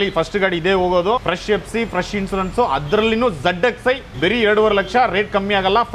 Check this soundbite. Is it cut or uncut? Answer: cut